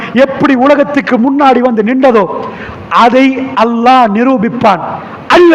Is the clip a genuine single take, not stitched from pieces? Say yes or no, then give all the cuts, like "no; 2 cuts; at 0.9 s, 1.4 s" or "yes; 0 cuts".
yes; 0 cuts